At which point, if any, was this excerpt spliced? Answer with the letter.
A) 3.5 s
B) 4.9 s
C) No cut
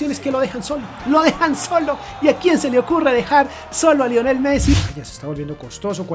B